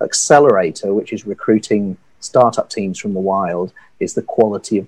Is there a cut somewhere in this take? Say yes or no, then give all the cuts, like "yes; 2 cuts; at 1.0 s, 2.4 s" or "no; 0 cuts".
no; 0 cuts